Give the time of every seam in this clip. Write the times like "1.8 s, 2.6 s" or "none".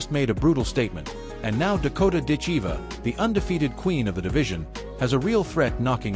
none

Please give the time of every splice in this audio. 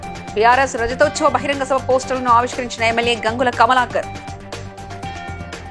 none

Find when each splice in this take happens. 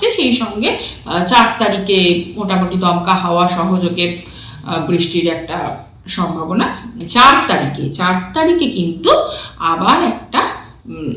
7.0 s

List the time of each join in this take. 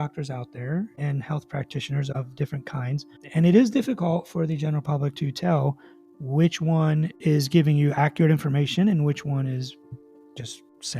0.9 s, 2.1 s

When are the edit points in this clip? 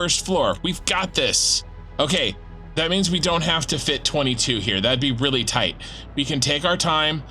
2.5 s

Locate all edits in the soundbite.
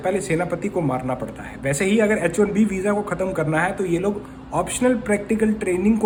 none

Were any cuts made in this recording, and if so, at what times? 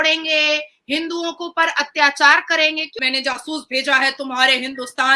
3.0 s

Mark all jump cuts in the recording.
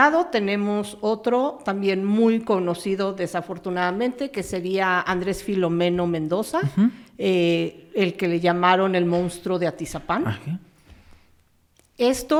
none

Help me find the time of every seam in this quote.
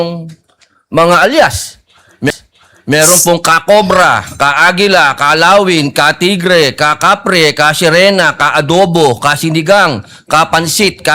none

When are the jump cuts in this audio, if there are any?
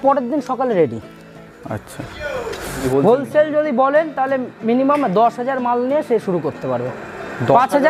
2.8 s

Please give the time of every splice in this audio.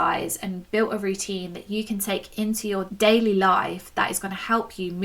2.9 s

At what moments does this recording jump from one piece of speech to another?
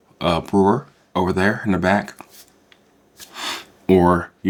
none

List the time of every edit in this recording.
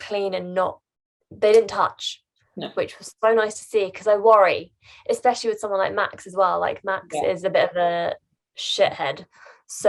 none

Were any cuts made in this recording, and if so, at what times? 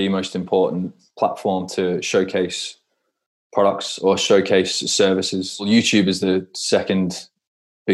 1.0 s, 5.7 s

